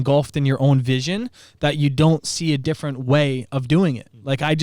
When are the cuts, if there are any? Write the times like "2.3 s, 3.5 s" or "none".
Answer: none